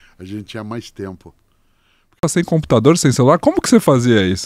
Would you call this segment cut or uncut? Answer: cut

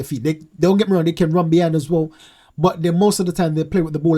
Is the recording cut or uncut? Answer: uncut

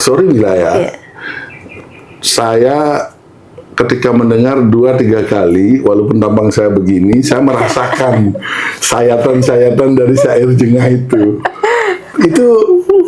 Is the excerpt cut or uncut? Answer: uncut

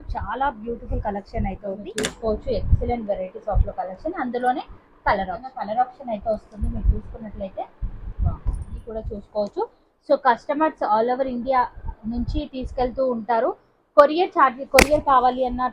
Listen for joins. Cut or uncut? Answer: cut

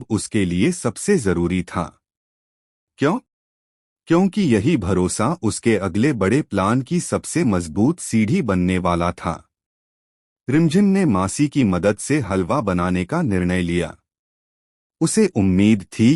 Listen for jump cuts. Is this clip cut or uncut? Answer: uncut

